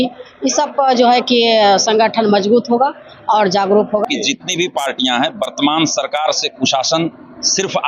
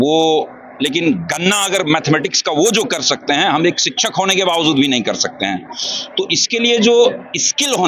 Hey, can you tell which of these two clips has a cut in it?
first; 1 cut; at 4.0 s

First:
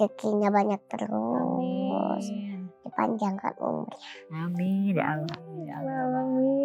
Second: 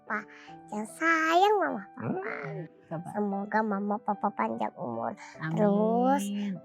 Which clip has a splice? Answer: second; 1 cut; at 2.5 s

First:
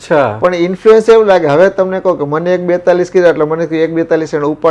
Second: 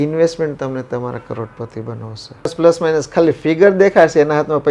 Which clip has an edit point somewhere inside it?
second; 1 cut; at 2.5 s

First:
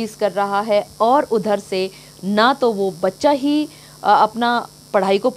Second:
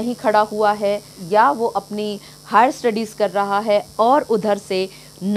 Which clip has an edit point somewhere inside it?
second; 1 cut; at 1.1 s

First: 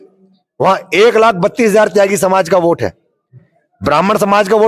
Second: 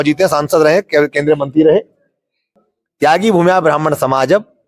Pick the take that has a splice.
second; 1 cut; at 2.5 s

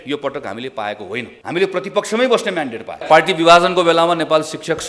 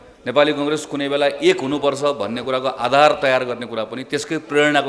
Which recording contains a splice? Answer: first; 2 cuts; at 1.3 s, 3.0 s

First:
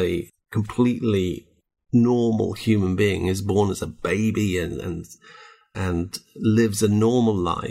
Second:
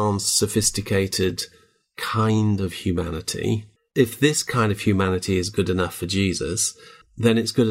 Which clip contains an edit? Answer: second; 1 cut; at 3.9 s

